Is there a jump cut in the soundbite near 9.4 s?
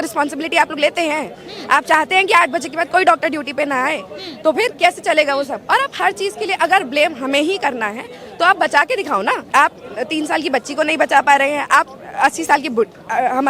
yes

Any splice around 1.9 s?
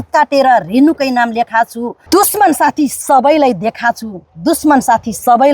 yes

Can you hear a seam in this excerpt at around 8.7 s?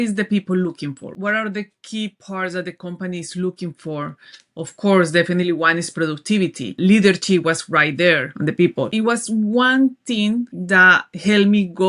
yes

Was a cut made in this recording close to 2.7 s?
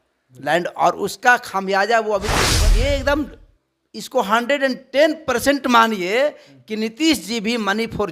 yes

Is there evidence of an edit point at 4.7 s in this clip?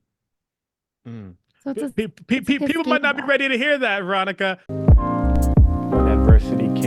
yes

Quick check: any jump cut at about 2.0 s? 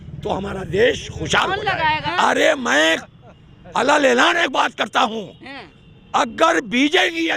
yes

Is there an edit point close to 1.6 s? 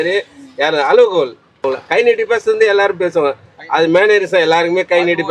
yes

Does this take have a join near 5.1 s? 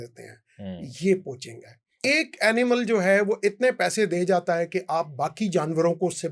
no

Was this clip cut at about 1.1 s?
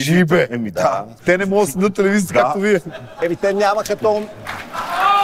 yes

